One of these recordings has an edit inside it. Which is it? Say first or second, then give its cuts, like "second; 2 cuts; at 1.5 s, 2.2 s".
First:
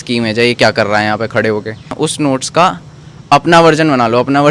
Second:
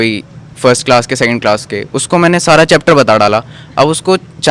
first; 1 cut; at 1.9 s